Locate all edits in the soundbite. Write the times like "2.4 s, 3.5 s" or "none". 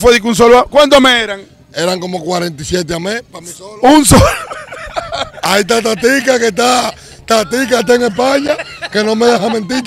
none